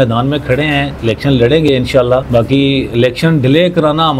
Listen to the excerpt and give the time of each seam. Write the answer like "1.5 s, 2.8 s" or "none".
0.9 s, 2.3 s

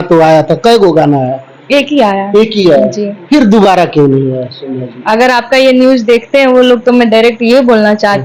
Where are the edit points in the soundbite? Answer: none

